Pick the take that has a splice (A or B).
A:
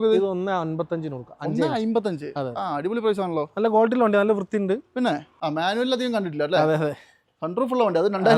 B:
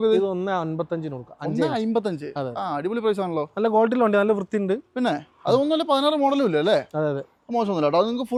A